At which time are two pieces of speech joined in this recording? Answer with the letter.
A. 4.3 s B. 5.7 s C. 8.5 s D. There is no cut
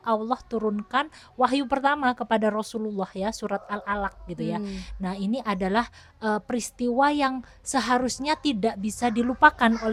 D